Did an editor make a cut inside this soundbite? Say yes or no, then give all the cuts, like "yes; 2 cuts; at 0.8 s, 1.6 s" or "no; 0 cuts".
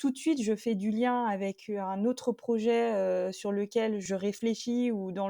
yes; 1 cut; at 4.0 s